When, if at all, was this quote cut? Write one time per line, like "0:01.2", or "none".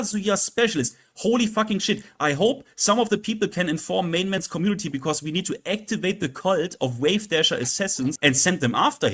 0:08.2